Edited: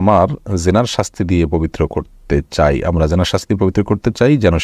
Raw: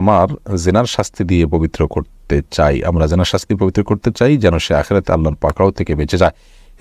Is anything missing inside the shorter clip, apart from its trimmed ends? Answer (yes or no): no